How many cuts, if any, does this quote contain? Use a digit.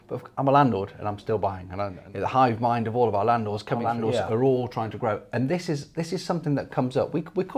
2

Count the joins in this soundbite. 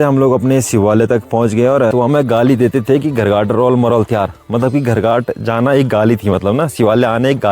1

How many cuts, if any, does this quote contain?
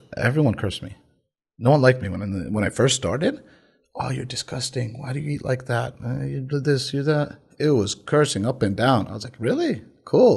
0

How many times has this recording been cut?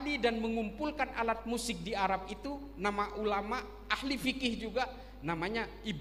0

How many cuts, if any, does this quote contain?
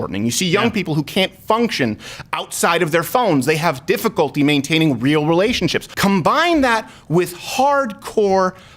1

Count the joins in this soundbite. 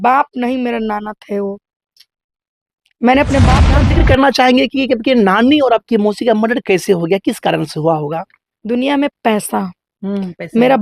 1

